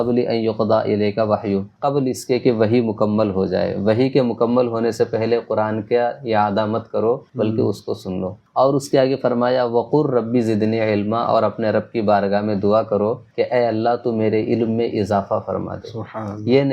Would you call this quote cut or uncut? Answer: cut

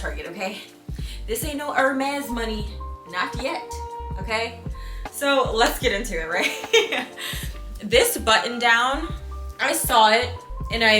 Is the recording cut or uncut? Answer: uncut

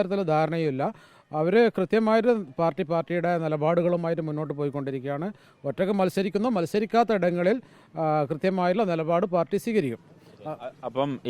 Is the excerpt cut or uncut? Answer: uncut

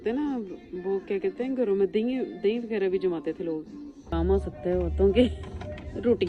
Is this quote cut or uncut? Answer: cut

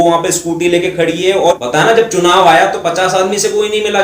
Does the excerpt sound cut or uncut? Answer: cut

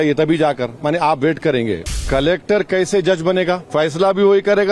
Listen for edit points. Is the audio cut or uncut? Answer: cut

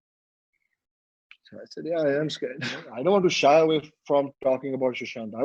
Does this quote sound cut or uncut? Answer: cut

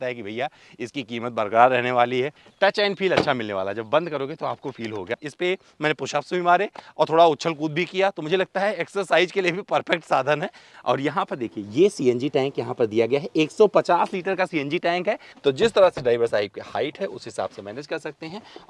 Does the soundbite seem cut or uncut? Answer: cut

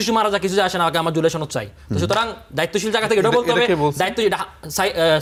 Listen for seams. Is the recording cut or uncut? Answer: uncut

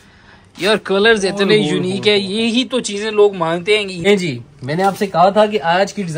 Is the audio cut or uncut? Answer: cut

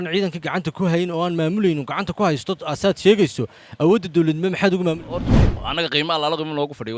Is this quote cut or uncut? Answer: cut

